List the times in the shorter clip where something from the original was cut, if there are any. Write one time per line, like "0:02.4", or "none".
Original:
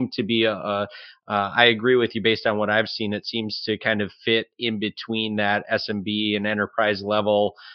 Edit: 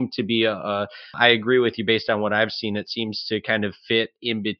0:01.1